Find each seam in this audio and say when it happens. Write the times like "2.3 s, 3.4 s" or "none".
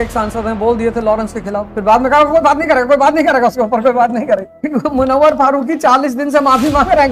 1.6 s, 4.5 s